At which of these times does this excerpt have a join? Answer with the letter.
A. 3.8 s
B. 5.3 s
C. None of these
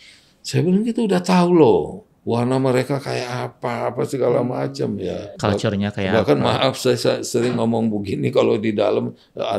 B